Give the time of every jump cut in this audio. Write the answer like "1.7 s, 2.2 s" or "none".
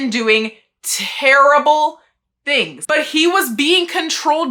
2.8 s

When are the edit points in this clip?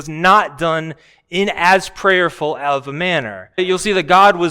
3.6 s

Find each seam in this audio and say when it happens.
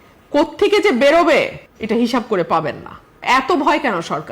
3.1 s

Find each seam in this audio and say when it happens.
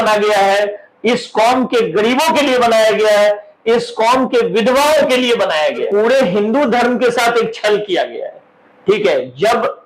5.8 s

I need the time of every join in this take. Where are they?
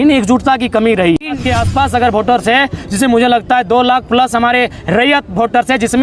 1.4 s

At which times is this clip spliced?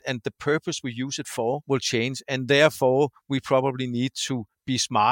1.6 s

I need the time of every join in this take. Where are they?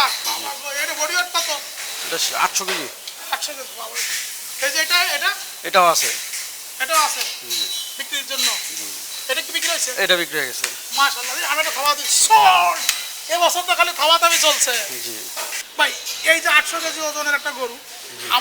15.6 s

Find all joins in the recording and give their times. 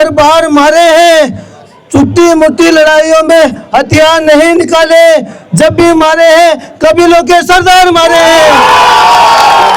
none

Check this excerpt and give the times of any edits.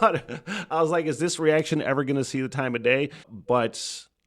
3.3 s

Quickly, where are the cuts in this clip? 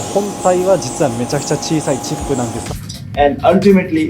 2.6 s

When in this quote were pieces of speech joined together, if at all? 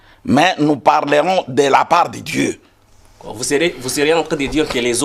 none

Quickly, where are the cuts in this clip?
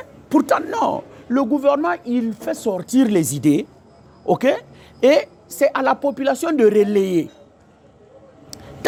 none

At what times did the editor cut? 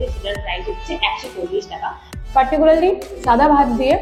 2.1 s

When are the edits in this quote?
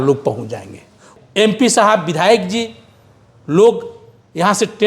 1.0 s

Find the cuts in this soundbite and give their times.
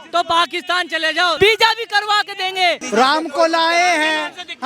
1.4 s, 2.8 s

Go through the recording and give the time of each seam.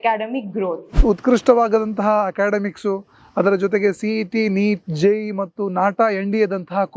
0.9 s

